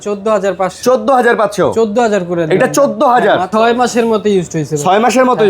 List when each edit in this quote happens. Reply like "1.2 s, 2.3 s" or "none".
3.5 s